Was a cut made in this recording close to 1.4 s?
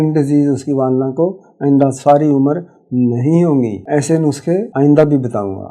no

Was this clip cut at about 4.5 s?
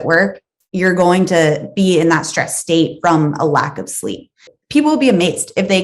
yes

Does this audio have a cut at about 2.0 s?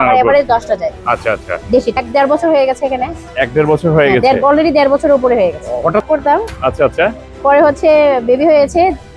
yes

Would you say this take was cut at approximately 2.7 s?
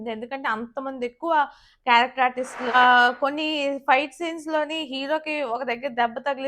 yes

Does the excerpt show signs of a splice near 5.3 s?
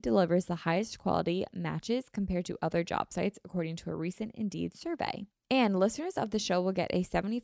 yes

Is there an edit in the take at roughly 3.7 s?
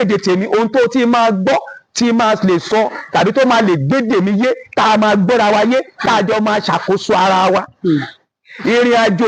no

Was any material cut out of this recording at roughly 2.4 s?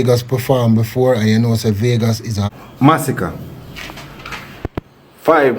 yes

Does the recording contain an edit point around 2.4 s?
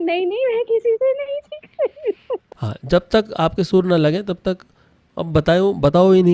yes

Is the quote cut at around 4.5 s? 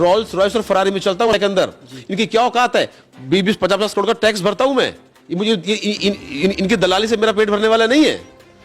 no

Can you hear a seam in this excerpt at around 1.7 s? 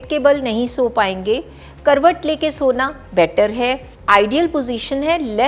no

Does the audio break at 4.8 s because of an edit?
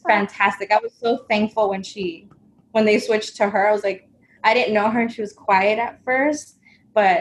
no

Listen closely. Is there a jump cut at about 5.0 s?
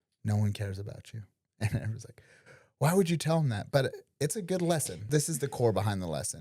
yes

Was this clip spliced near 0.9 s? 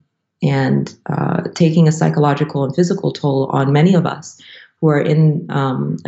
no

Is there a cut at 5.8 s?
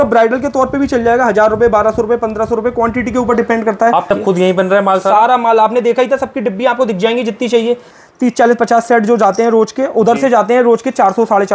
no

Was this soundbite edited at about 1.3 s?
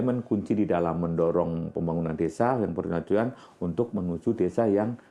no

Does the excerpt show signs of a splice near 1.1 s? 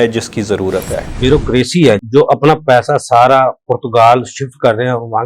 yes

